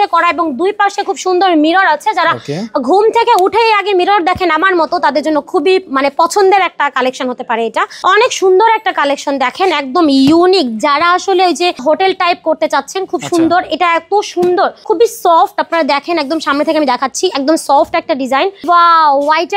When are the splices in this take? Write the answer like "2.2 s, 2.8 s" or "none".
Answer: 7.9 s, 11.8 s, 14.8 s, 18.6 s